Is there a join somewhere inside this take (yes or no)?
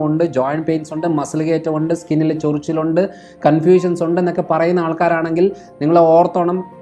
no